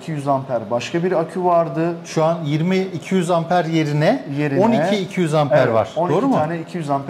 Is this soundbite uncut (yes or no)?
yes